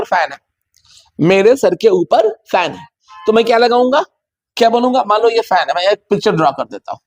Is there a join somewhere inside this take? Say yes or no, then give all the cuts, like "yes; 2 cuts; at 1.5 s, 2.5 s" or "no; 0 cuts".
no; 0 cuts